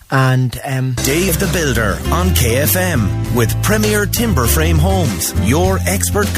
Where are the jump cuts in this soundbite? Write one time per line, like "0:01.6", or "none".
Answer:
0:01.0